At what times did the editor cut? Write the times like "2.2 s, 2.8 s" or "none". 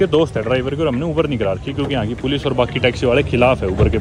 none